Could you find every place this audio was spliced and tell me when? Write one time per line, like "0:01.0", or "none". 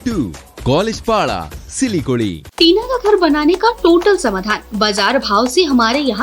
0:02.4